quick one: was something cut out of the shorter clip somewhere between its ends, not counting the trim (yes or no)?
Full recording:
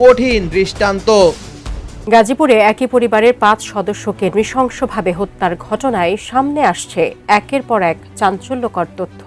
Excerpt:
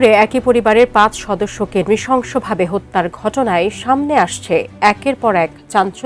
no